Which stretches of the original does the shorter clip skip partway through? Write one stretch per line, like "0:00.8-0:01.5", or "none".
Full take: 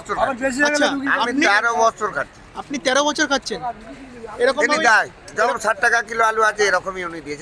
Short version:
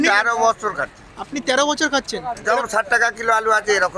0:03.7-0:05.2